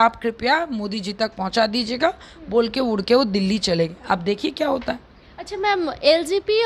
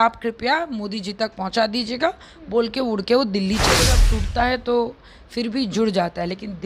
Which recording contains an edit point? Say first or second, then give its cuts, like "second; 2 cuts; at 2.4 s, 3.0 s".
second; 1 cut; at 4.0 s